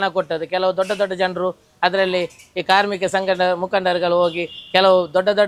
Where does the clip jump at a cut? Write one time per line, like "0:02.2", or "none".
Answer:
none